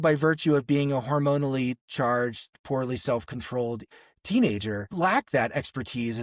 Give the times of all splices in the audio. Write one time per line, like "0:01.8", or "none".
0:03.9
0:04.9